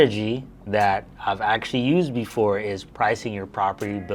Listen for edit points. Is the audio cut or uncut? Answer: uncut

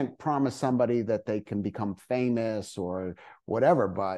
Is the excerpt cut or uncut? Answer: uncut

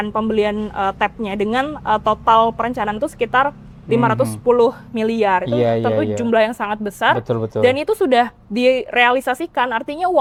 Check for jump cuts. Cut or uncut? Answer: uncut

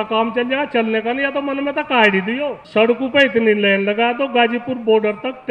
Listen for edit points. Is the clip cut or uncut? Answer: cut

